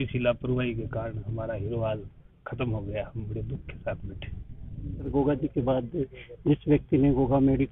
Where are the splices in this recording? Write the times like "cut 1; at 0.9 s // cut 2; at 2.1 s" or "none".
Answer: cut 1; at 5.1 s